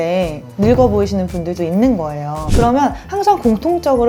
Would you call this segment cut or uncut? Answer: cut